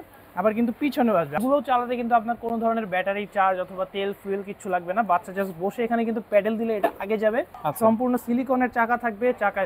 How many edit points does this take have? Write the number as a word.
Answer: two